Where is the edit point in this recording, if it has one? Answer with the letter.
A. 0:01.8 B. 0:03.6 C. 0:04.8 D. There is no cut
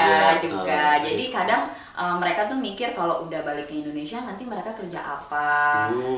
D